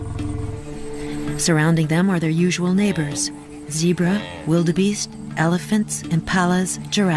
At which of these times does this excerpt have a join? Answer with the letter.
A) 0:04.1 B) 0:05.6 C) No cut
A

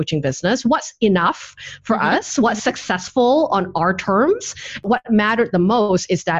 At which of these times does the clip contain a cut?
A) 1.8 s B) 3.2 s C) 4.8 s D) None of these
C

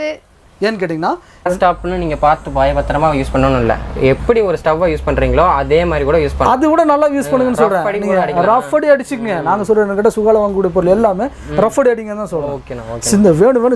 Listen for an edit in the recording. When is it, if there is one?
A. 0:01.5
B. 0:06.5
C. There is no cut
A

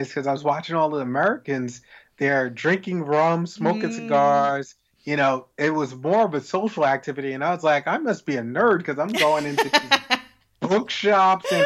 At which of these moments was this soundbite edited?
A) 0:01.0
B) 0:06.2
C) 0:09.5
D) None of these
D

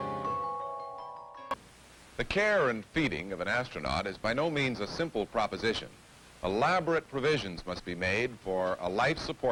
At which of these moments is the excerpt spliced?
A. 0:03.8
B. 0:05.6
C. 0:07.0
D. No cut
D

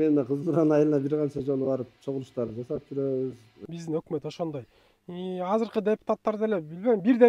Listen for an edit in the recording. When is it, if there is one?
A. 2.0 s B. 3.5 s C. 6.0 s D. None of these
B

